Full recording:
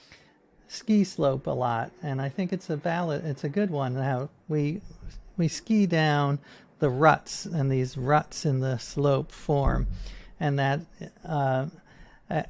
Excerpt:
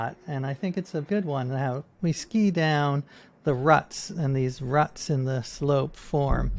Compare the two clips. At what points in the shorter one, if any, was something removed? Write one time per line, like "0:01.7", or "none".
0:01.1
0:01.9